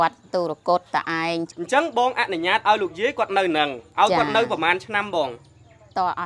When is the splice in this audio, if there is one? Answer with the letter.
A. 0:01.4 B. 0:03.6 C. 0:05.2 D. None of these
A